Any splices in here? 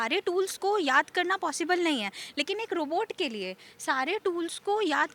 no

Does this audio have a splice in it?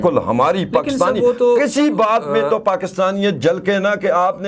no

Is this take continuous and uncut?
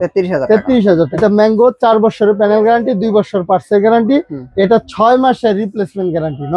no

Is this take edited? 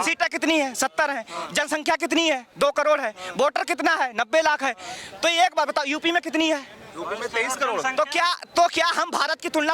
no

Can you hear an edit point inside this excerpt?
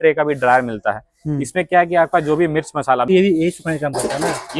yes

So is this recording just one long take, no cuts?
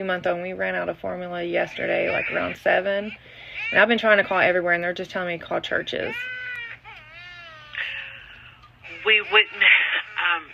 yes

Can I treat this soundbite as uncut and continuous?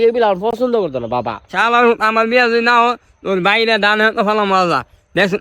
no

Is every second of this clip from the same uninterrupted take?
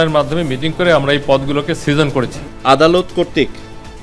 no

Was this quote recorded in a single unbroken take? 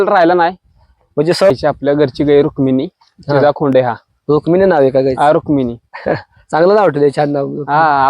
no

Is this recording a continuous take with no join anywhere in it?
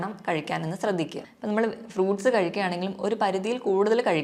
no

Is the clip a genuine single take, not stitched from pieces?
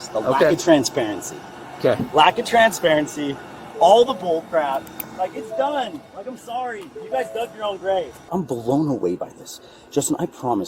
no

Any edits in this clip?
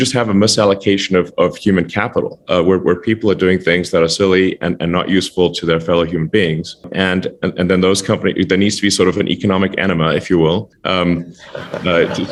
no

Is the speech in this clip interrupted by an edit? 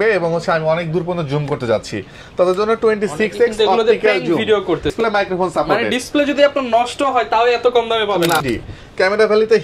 yes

